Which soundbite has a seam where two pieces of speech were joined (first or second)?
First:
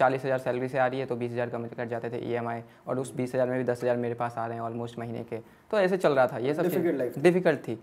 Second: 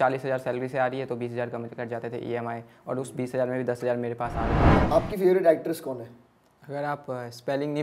second